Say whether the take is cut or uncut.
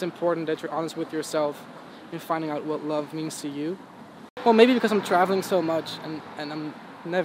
cut